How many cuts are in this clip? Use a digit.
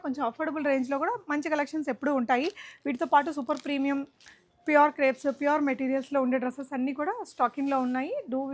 0